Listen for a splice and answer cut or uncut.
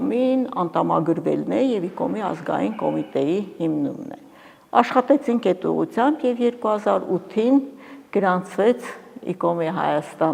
uncut